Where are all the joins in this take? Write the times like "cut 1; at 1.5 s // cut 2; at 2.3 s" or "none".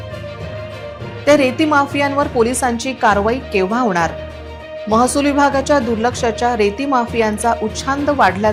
none

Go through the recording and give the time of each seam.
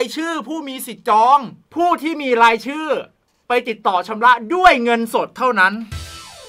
cut 1; at 1.6 s

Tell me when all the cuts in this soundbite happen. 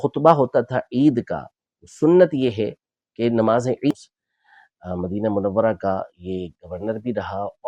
cut 1; at 3.9 s

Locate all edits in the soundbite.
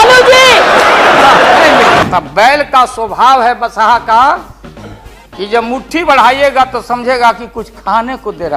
cut 1; at 2.0 s

